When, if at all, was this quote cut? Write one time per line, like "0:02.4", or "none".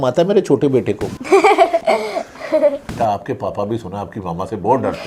0:01.1
0:01.8
0:02.9